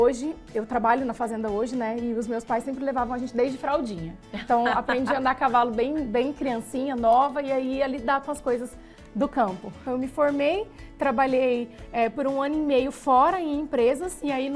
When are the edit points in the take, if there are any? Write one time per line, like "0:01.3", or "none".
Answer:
0:09.8